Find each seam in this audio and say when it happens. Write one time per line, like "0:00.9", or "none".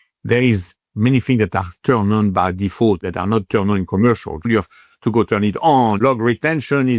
0:03.0
0:04.5
0:06.0